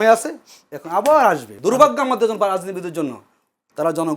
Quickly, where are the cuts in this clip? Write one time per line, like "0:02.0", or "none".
0:01.5